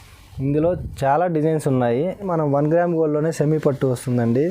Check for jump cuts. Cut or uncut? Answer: cut